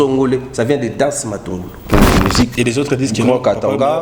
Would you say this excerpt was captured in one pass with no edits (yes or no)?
no